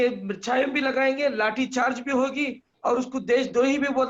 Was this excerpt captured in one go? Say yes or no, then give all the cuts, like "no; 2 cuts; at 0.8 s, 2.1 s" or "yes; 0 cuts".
yes; 0 cuts